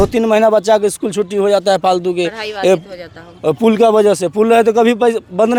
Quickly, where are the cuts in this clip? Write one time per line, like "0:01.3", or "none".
none